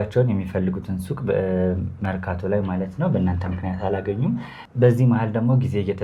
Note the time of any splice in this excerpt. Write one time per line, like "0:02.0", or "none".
none